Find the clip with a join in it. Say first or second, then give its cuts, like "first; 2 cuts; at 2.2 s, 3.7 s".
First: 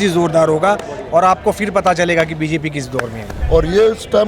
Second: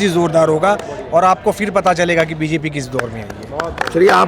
first; 1 cut; at 3.3 s